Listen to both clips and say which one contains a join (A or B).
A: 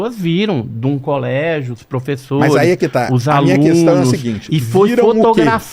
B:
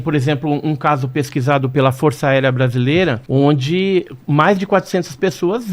B